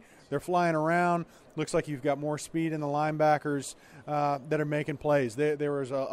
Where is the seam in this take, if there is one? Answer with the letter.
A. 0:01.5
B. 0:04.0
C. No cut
C